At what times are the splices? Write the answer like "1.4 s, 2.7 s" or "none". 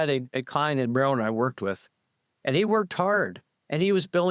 none